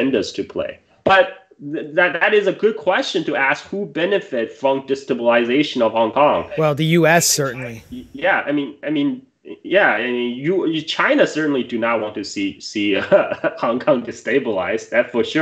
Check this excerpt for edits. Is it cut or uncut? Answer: cut